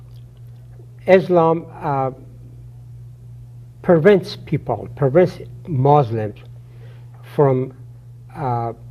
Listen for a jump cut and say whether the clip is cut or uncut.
uncut